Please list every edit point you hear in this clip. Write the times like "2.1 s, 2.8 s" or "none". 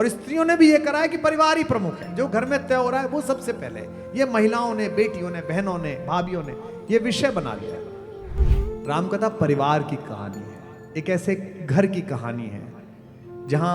8.4 s